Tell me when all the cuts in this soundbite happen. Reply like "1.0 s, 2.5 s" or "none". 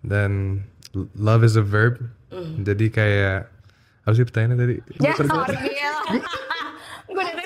4.9 s